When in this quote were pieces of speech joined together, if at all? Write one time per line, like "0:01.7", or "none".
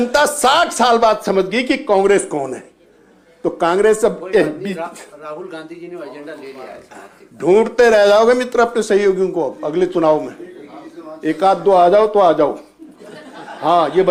none